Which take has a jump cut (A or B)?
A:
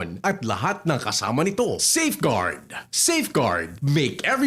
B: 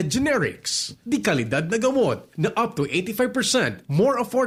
A